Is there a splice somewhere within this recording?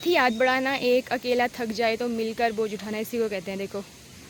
no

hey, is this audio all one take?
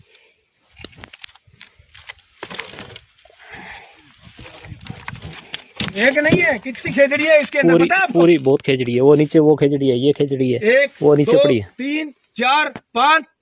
yes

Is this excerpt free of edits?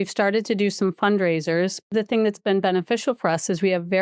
no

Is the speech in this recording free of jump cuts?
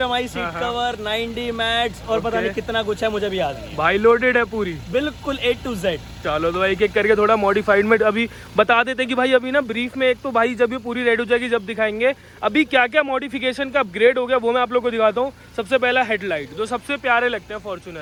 yes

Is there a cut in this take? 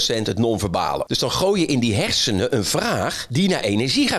yes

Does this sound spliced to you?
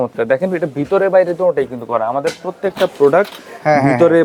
no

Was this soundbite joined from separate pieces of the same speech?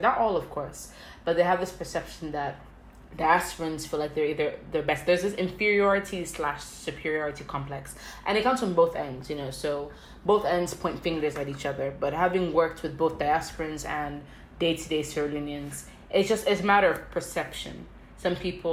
no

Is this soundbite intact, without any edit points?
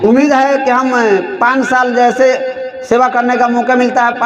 yes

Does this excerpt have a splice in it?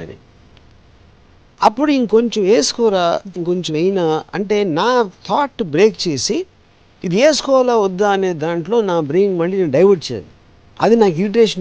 no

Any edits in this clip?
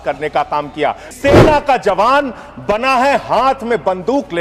yes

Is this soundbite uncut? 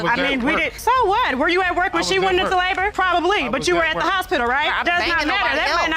yes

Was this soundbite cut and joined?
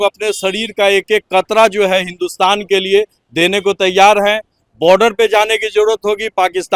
no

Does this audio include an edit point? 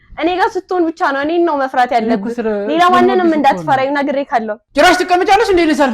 yes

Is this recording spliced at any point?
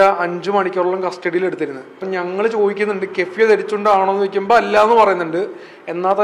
yes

